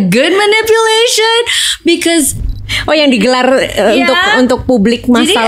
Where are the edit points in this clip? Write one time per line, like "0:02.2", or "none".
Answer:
0:02.4